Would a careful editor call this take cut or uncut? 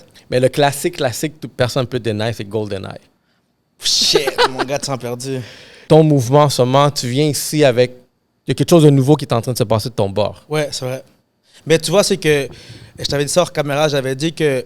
cut